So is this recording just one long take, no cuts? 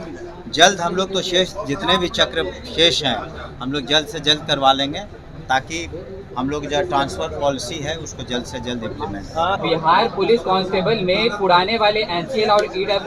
no; 1 cut; at 9.6 s

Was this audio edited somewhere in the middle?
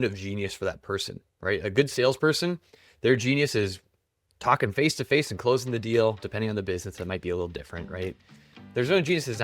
no; 0 cuts

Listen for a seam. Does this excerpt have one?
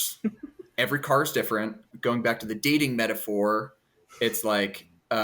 yes; 1 cut; at 1.9 s

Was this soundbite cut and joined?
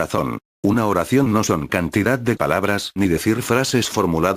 yes; 1 cut; at 2.6 s

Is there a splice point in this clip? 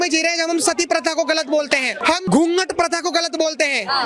yes; 1 cut; at 2.1 s

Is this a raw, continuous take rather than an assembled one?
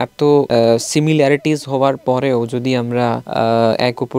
yes; 0 cuts

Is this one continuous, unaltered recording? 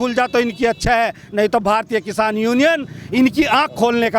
yes; 0 cuts

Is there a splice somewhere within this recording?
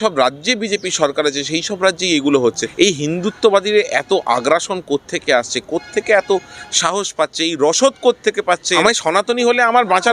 yes; 2 cuts; at 2.7 s, 8.7 s

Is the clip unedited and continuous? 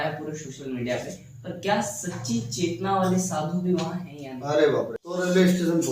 no; 1 cut; at 5.0 s

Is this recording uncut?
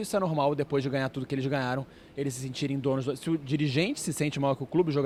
yes; 0 cuts

